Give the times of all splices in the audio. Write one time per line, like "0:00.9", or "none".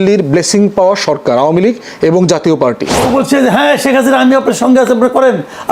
0:03.0